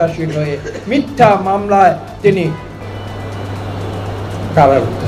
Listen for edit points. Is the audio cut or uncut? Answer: uncut